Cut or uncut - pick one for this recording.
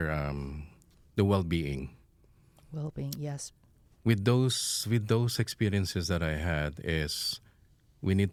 uncut